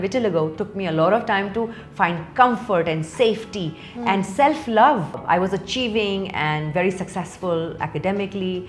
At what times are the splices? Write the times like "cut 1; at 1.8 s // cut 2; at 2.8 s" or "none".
cut 1; at 5.2 s